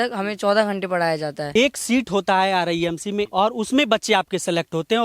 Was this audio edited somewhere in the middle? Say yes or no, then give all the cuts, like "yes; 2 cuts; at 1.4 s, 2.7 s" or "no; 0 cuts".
yes; 2 cuts; at 1.5 s, 3.3 s